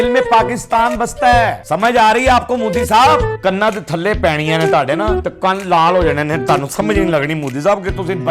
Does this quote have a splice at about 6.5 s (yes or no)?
no